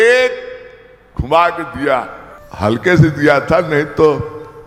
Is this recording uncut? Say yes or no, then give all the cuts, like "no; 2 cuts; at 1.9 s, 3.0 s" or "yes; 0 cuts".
yes; 0 cuts